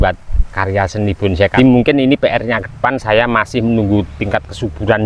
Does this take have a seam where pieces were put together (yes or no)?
yes